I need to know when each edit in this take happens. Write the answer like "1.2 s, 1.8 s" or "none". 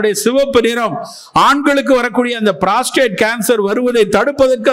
none